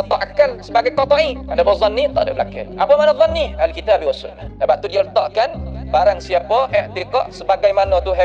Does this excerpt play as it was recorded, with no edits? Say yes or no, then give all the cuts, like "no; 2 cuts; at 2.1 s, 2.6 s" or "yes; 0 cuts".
no; 1 cut; at 4.5 s